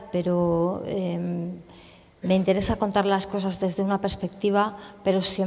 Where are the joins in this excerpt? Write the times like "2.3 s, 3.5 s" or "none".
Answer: 3.8 s